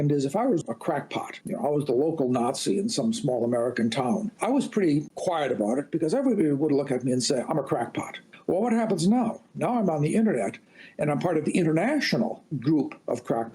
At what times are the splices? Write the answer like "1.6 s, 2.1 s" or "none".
none